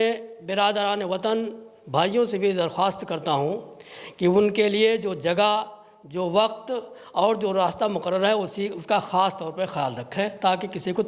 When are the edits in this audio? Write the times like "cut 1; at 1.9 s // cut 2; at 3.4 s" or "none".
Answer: none

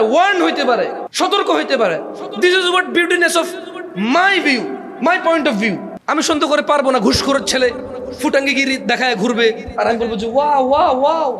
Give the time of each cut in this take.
cut 1; at 1.0 s // cut 2; at 5.9 s

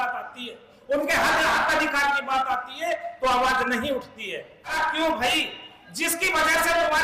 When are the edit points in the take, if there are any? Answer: cut 1; at 4.8 s

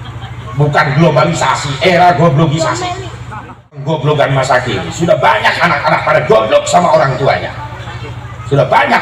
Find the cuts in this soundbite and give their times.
cut 1; at 3.8 s

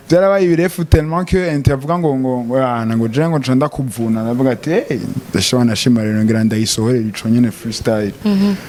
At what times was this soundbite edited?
none

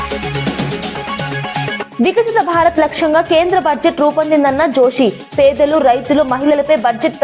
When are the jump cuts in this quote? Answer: none

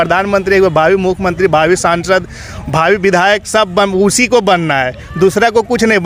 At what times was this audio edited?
none

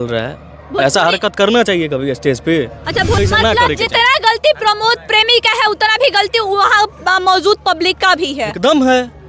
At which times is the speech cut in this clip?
cut 1; at 3.2 s

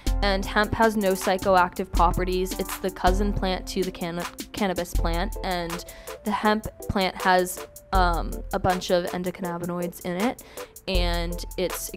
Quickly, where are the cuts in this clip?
none

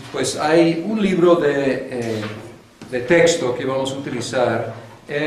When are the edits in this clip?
none

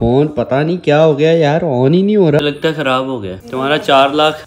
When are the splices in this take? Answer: cut 1; at 2.4 s

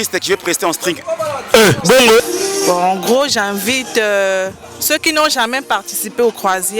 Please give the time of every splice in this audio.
cut 1; at 2.2 s

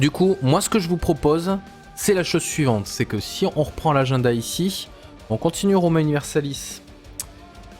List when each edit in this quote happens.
cut 1; at 2.2 s

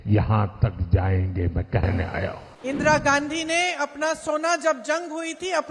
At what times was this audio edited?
cut 1; at 2.5 s

